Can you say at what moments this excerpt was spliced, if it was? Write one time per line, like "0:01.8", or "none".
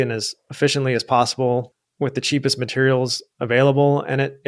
0:01.8